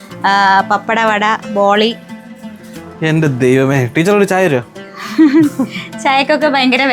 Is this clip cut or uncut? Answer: uncut